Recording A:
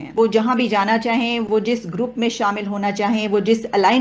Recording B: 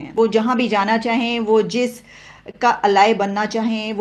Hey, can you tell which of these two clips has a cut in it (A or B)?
A